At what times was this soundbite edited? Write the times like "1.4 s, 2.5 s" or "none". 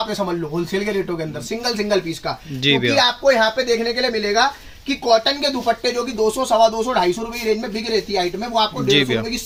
none